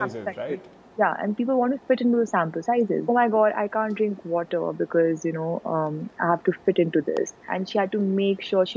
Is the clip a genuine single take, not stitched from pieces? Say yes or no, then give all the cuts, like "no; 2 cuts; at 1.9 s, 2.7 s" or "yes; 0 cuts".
no; 2 cuts; at 3.1 s, 7.5 s